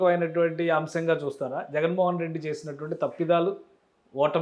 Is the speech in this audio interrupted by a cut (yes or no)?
no